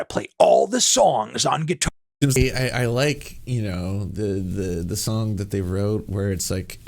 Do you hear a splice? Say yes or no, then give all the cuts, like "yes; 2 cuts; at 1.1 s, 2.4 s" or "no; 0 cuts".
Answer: yes; 1 cut; at 2.4 s